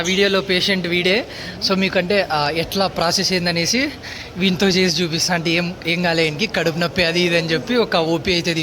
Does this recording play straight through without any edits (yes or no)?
yes